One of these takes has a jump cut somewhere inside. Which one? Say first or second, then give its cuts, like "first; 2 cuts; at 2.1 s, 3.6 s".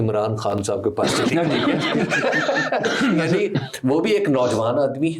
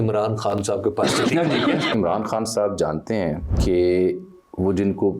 second; 2 cuts; at 1.9 s, 3.5 s